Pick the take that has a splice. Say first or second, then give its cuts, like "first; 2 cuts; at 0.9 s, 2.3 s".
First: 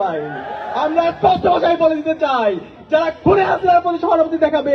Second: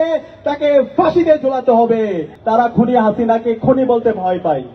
second; 1 cut; at 2.3 s